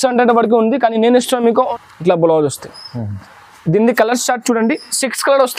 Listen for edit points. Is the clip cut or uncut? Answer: cut